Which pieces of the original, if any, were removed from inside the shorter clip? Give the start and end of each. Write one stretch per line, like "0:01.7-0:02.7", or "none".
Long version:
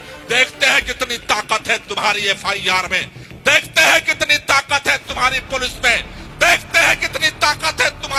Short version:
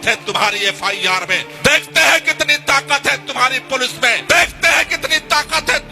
0:03.0-0:03.2
0:06.0-0:06.3